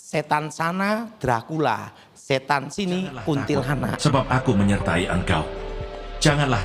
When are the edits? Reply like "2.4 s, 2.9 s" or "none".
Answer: 4.0 s